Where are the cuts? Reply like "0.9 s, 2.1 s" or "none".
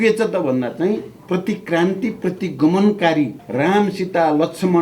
1.1 s, 3.4 s